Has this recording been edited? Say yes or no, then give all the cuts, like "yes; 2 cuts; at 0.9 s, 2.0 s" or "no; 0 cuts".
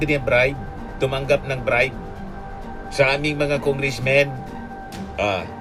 no; 0 cuts